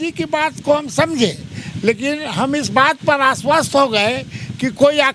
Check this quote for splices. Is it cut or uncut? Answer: uncut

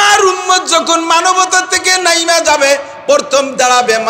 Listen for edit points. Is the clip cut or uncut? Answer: uncut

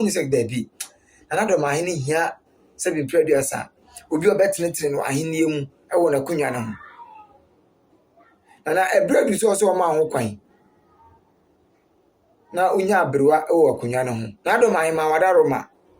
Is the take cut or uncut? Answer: cut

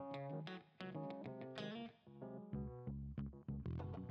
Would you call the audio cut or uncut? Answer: uncut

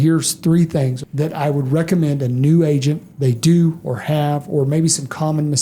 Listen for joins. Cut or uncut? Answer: cut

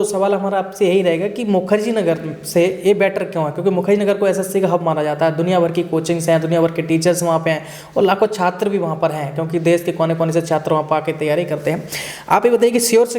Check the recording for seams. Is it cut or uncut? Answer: uncut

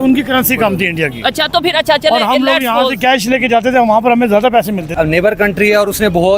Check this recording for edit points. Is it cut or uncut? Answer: cut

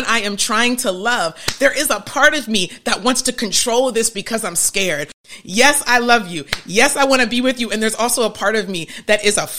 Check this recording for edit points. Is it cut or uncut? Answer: cut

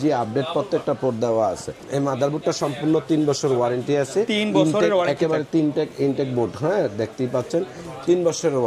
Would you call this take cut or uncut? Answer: uncut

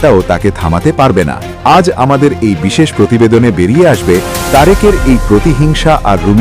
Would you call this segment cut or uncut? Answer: cut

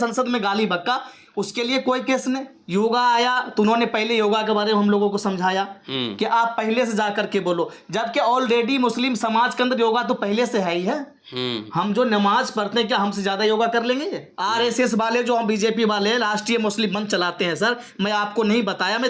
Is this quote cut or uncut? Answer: cut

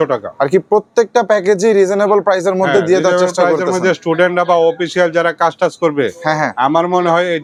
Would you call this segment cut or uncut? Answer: uncut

